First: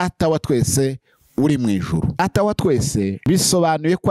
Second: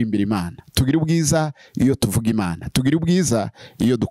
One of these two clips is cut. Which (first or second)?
first